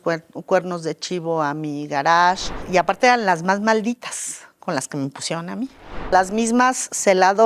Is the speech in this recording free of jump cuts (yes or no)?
no